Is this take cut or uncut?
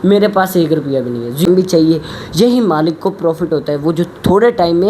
cut